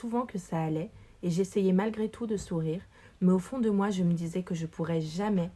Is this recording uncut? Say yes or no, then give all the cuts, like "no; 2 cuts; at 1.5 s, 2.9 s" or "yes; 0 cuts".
yes; 0 cuts